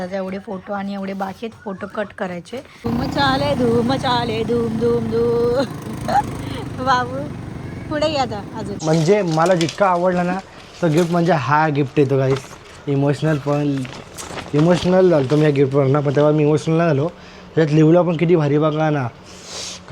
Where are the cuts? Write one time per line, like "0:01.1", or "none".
0:02.8
0:08.7